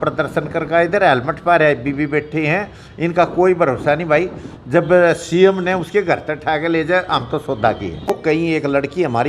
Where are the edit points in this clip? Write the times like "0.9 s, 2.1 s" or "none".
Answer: 8.1 s